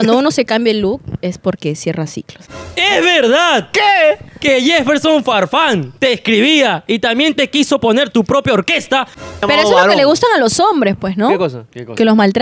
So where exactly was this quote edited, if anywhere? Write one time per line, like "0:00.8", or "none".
0:02.4
0:09.4